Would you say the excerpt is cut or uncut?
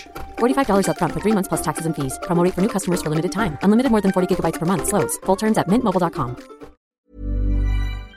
cut